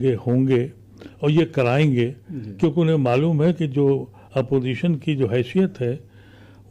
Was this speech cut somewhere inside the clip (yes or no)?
no